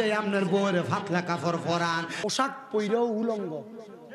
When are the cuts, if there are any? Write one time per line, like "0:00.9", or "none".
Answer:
0:02.1